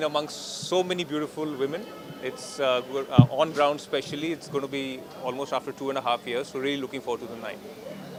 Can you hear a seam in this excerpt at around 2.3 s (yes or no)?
no